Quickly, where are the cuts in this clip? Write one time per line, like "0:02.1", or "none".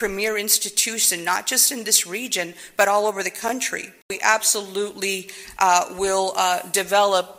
0:04.1